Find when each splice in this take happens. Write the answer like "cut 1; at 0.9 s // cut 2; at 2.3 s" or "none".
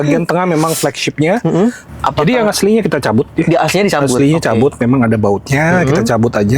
cut 1; at 1.8 s

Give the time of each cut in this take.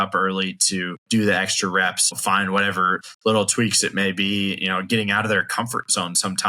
cut 1; at 1.0 s // cut 2; at 2.2 s // cut 3; at 3.0 s

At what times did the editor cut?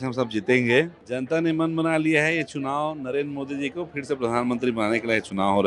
cut 1; at 1.0 s

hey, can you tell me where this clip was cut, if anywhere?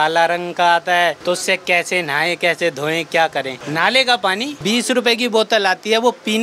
cut 1; at 1.2 s // cut 2; at 3.6 s // cut 3; at 4.6 s

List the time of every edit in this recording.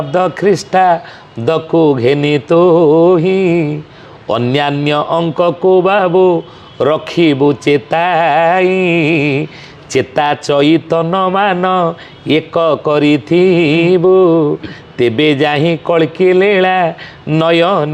none

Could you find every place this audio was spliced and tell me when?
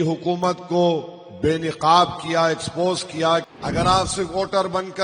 cut 1; at 3.5 s

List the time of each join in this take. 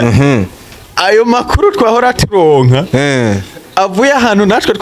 none

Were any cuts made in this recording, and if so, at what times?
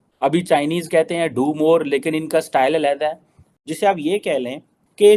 none

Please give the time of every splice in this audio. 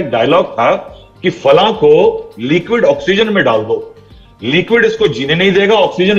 none

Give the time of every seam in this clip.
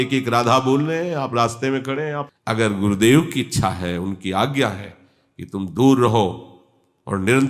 cut 1; at 2.3 s

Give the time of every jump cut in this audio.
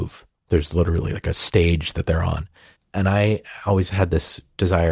cut 1; at 2.0 s

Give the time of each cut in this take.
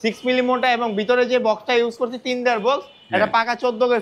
none

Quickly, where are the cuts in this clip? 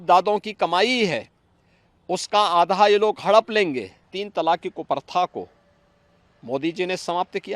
cut 1; at 4.2 s

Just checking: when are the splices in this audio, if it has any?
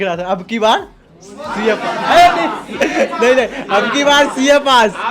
none

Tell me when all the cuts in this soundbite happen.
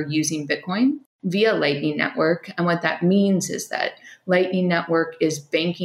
cut 1; at 1.1 s

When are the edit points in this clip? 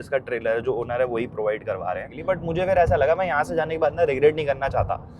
cut 1; at 2.1 s

